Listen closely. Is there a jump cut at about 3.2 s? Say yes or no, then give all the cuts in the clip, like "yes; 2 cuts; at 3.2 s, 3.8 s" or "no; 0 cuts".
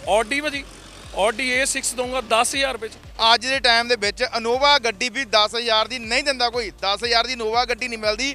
yes; 1 cut; at 3.2 s